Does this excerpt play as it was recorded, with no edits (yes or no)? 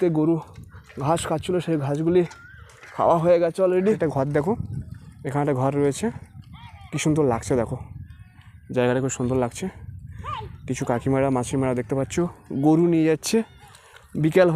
no